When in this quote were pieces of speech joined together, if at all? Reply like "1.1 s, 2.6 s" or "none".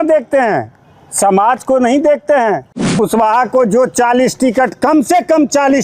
2.8 s